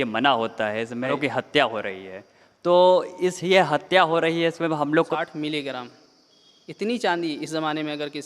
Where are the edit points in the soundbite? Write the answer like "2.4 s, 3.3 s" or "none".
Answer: 1.2 s, 5.1 s